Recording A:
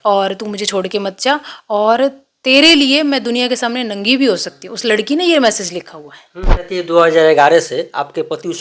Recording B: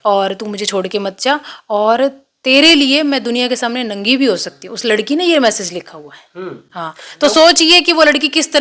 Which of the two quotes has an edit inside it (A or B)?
A